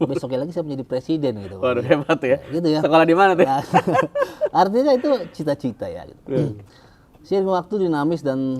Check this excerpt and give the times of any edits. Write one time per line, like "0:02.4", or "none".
none